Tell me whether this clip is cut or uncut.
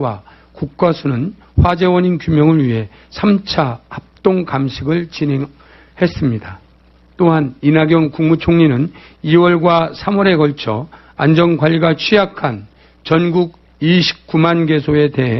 uncut